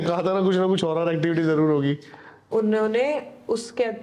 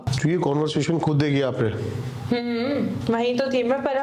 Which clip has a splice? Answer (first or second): first